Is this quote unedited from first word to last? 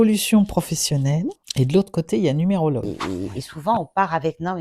no; 2 cuts; at 1.4 s, 2.9 s

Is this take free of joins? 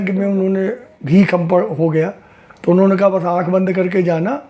yes; 0 cuts

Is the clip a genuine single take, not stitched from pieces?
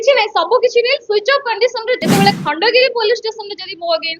no; 1 cut; at 2.0 s

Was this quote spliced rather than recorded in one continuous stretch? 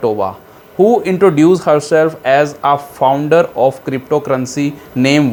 no; 0 cuts

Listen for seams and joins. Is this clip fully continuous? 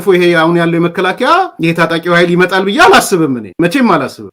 yes; 0 cuts

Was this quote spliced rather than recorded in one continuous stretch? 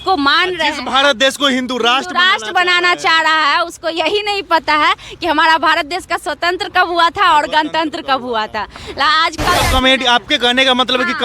yes; 1 cut; at 9.6 s

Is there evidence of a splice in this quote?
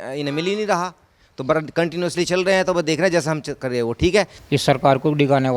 yes; 1 cut; at 4.4 s

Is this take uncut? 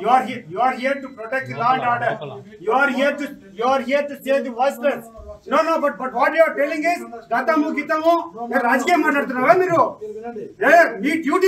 no; 1 cut; at 6.5 s

